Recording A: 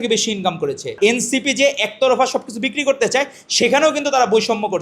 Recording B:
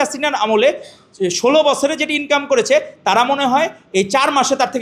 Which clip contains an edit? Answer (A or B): A